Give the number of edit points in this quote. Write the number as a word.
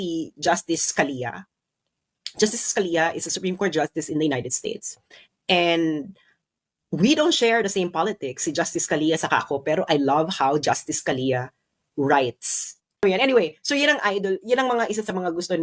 one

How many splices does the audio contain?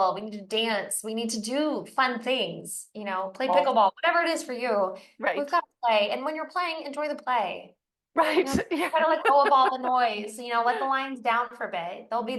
zero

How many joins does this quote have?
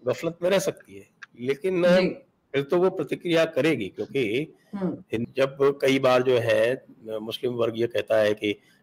one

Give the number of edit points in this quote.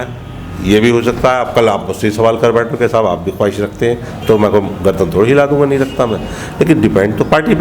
zero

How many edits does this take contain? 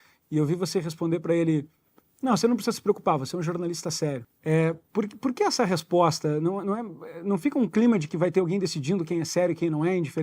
one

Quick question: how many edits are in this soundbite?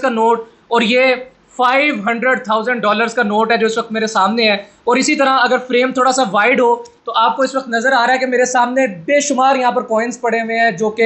zero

